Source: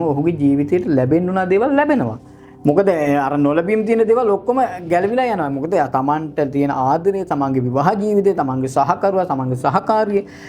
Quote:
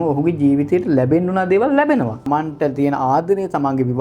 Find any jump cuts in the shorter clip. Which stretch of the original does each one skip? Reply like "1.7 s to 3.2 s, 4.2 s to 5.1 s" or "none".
2.3 s to 6.0 s